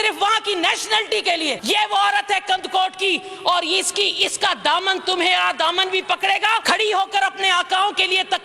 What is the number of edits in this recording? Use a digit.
2